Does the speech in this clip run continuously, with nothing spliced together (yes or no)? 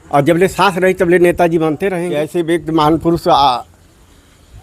no